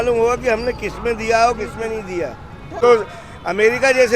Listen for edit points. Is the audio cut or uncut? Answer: cut